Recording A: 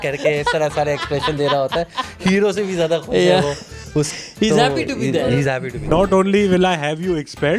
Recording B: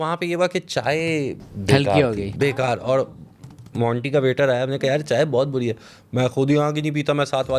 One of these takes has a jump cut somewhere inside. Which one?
A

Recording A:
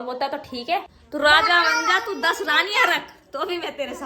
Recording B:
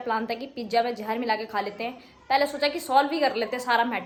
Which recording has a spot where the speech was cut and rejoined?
A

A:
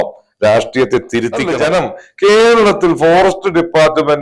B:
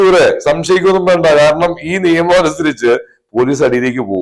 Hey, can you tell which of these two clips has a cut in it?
A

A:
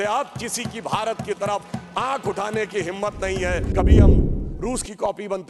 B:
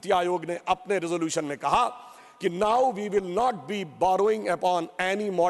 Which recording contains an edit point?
A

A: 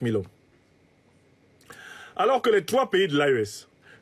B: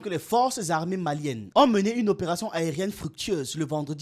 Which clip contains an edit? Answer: B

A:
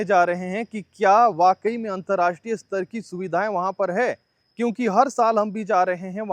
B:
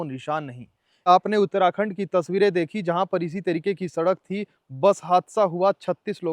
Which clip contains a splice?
B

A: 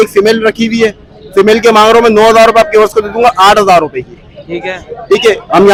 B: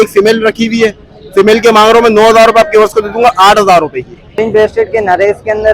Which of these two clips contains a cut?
B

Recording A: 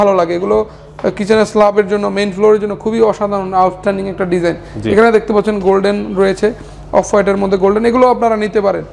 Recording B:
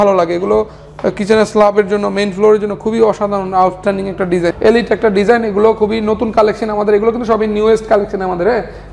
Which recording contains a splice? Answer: B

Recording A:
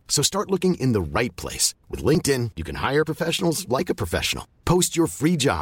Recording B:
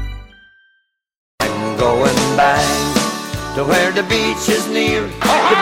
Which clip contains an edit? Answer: B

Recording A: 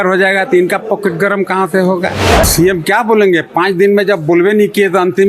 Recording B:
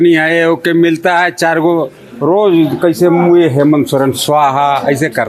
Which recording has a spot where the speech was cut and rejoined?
A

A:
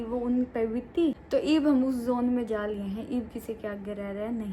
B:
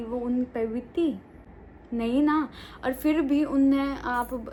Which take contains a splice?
A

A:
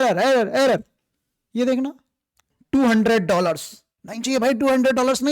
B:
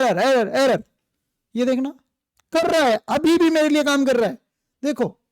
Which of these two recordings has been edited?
A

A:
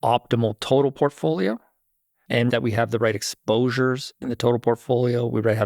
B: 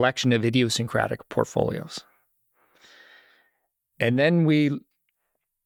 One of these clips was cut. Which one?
A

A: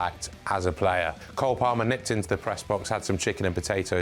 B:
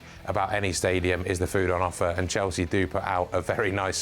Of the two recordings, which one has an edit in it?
A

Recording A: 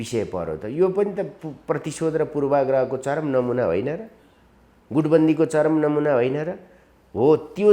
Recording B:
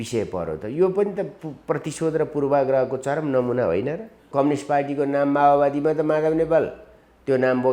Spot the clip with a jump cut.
B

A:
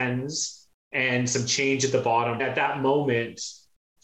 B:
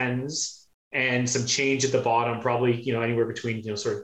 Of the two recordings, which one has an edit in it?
A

